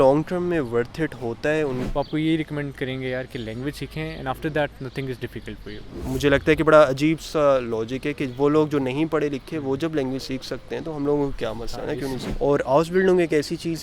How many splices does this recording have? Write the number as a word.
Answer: three